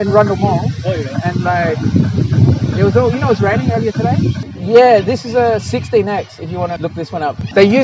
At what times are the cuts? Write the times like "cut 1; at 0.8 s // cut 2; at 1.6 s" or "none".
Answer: cut 1; at 4.4 s // cut 2; at 6.9 s